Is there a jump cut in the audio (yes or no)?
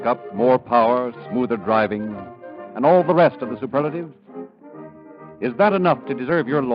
no